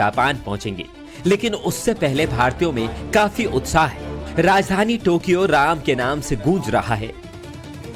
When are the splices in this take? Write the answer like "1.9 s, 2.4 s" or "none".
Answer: none